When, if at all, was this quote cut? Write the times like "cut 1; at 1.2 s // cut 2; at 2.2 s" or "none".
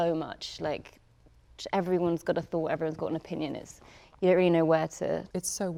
none